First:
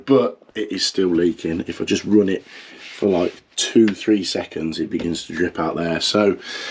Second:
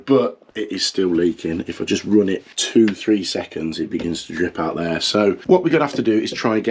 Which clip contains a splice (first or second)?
second